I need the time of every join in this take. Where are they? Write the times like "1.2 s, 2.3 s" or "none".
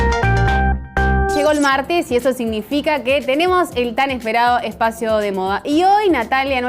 1.3 s